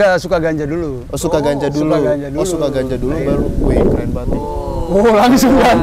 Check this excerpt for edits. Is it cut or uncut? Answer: uncut